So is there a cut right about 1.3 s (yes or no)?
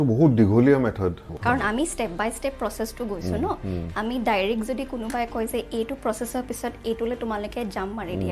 yes